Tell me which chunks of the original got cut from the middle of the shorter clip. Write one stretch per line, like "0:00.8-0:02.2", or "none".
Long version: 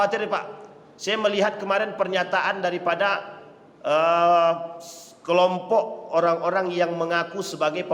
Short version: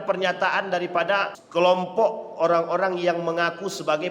0:03.3-0:05.1